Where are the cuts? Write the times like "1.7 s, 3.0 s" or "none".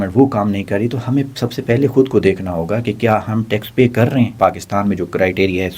4.3 s